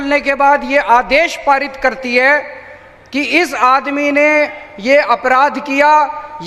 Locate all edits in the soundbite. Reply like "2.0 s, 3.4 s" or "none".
none